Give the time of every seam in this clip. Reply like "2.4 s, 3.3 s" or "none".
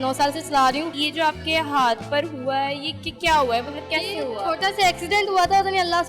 1.0 s